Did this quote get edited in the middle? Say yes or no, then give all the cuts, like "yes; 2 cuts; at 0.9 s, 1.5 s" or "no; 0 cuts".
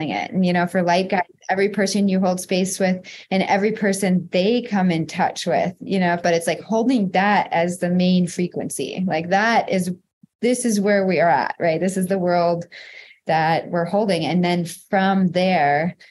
yes; 1 cut; at 6.2 s